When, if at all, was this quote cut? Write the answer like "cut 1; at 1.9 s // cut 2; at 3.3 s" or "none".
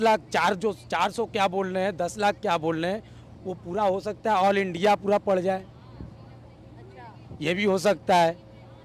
none